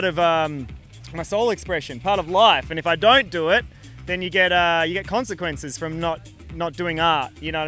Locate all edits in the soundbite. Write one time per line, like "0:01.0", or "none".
none

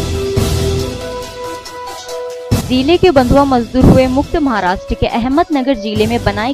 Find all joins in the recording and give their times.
0:01.0

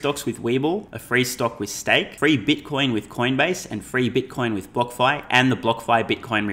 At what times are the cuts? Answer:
0:01.0
0:02.1

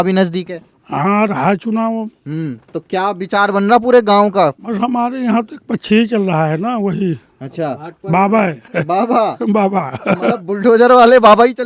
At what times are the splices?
none

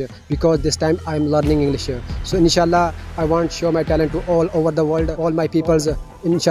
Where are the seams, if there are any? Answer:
0:05.1

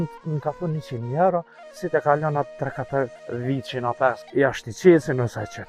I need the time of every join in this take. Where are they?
0:03.2
0:04.2

